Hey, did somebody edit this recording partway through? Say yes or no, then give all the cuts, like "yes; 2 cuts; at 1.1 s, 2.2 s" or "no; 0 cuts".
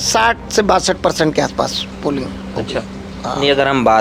no; 0 cuts